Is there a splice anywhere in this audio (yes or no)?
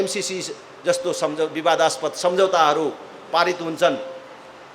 no